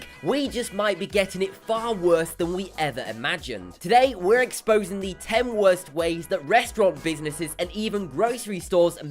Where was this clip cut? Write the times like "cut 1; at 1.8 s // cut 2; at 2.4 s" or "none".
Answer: cut 1; at 1.0 s